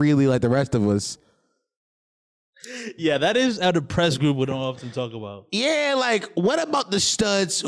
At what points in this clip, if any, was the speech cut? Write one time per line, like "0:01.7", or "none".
none